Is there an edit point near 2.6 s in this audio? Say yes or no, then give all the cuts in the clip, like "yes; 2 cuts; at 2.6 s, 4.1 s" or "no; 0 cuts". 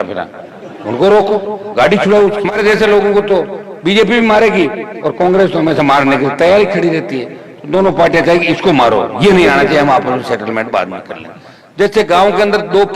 yes; 1 cut; at 2.6 s